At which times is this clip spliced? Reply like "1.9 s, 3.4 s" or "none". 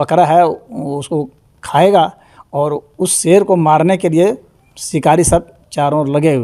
none